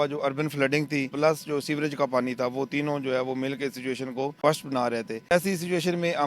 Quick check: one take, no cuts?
no; 3 cuts; at 1.1 s, 4.4 s, 5.3 s

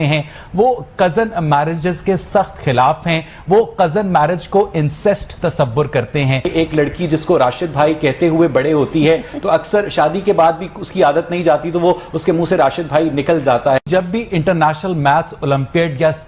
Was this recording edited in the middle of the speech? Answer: yes; 2 cuts; at 6.4 s, 13.9 s

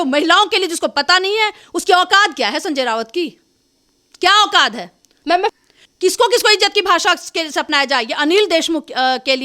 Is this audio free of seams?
no; 1 cut; at 5.5 s

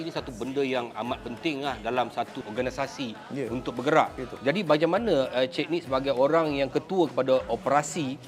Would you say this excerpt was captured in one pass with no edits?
yes; 0 cuts

